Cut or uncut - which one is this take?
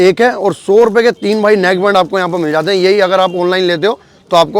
uncut